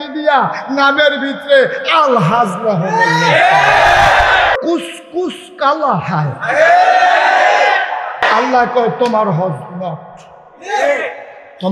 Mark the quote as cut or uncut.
cut